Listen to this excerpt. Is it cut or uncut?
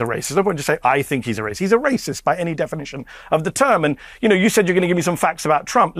uncut